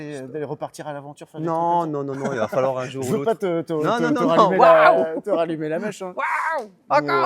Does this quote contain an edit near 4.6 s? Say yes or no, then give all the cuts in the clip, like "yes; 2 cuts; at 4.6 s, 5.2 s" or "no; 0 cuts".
no; 0 cuts